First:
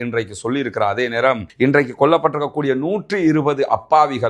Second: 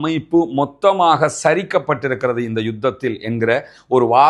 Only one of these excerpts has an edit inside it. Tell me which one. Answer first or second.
first